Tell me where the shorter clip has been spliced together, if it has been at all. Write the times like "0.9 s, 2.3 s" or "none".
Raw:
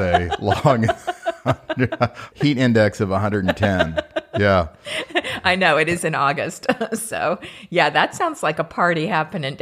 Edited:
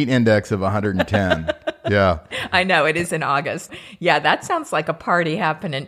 2.3 s, 3.7 s